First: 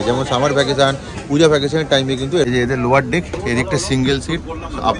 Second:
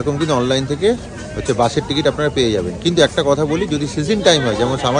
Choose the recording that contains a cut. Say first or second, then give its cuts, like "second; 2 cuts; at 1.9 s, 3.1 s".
first; 1 cut; at 2.4 s